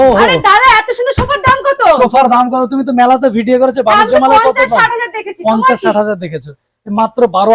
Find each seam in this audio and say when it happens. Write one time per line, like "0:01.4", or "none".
none